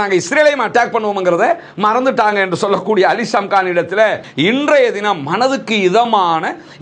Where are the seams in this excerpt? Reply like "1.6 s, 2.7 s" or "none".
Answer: 4.2 s